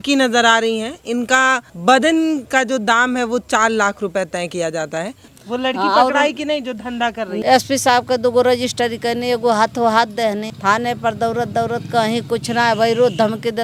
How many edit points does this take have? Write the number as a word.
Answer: four